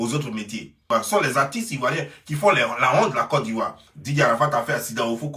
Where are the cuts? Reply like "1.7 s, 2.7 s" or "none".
1.0 s